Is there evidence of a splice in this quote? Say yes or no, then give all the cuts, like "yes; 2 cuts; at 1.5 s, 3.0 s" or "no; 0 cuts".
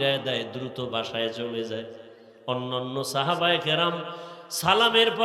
no; 0 cuts